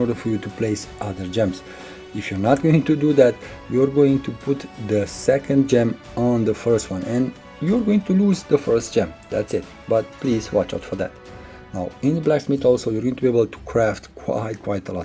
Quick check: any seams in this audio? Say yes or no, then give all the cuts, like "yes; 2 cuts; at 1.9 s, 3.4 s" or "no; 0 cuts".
no; 0 cuts